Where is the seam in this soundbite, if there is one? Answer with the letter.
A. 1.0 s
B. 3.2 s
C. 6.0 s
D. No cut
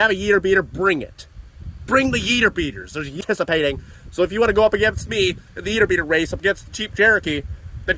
B